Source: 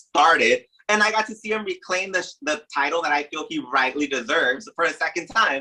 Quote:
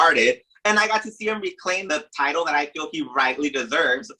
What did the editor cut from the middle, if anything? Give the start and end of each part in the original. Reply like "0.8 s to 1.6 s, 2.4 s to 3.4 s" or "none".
2.1 s to 2.4 s